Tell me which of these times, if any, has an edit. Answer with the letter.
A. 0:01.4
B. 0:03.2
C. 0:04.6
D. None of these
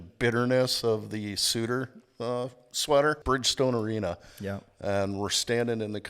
B